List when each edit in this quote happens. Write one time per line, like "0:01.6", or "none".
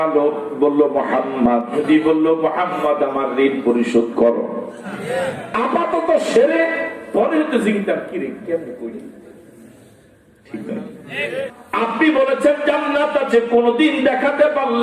0:01.8
0:04.9
0:11.5